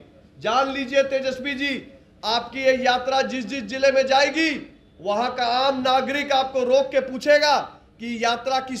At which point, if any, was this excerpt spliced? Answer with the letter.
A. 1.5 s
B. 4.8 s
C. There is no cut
C